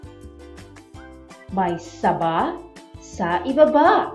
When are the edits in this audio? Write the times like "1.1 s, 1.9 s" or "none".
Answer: 0.9 s